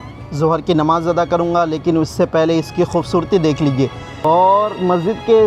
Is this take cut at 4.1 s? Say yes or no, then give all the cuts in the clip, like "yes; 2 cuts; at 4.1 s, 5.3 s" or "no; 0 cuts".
yes; 1 cut; at 4.1 s